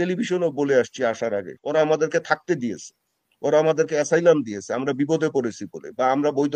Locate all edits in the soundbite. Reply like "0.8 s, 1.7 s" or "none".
1.5 s